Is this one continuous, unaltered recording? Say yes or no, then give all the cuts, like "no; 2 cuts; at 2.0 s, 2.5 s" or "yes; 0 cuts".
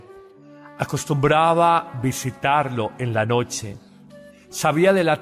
no; 1 cut; at 2.7 s